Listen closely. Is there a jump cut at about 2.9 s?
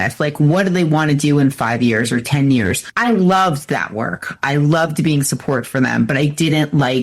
yes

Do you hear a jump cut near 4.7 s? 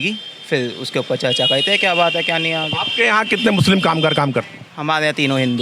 no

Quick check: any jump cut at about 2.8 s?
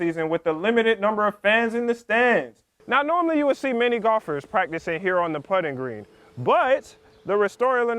yes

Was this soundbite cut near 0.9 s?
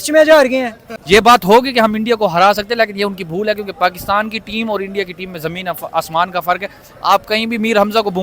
yes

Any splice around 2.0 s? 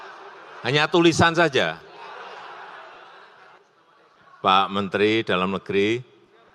no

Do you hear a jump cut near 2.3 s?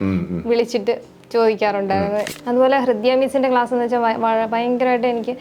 yes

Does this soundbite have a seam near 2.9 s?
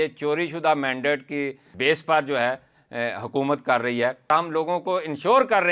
no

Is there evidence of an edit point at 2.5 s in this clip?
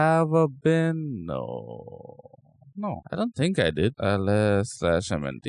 no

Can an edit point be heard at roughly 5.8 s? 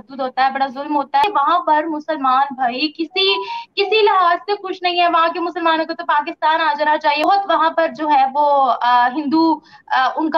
no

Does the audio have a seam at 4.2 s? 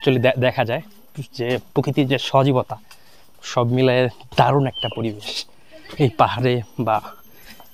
no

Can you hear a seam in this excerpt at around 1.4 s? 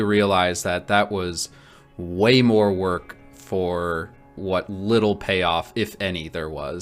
no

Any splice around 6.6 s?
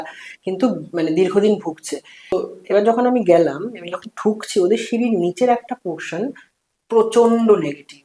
no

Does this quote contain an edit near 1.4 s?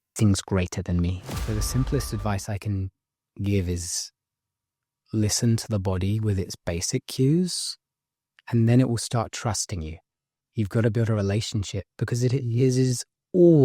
yes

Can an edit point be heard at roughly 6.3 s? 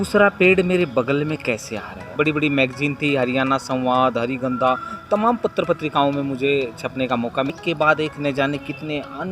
no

